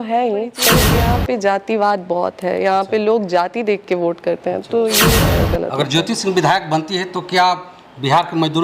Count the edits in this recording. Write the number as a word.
two